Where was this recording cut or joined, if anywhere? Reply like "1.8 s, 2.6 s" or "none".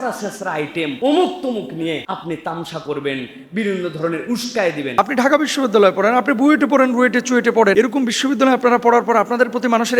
1.0 s, 2.0 s, 5.0 s, 7.7 s